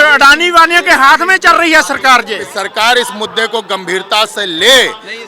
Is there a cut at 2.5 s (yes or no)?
yes